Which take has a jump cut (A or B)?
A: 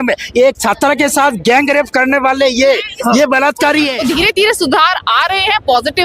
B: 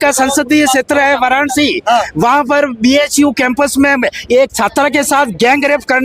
A